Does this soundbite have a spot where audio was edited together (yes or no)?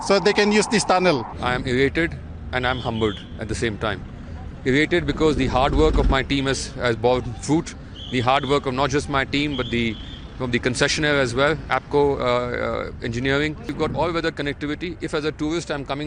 yes